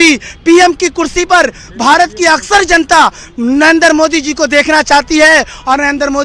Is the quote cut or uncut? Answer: uncut